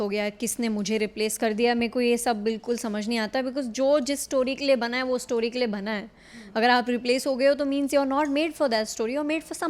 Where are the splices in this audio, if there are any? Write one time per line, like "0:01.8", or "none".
none